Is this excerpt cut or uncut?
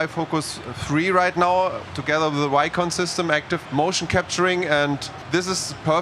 cut